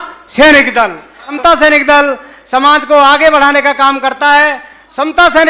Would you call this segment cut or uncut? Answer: cut